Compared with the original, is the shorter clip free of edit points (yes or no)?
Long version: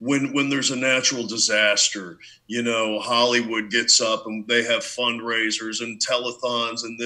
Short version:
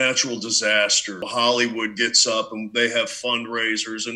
no